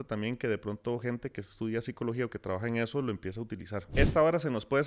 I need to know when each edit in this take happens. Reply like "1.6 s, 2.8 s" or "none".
3.8 s